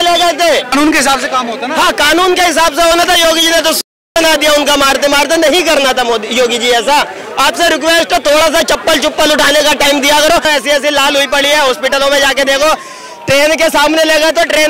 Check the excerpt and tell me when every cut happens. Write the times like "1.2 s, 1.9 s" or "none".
0.7 s, 10.5 s